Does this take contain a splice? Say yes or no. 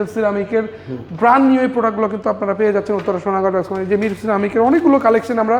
no